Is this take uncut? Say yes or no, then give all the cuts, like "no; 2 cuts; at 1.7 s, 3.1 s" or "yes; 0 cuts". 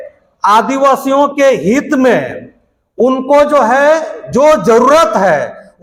yes; 0 cuts